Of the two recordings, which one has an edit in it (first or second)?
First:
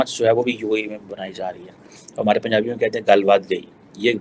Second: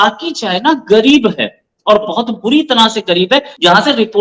first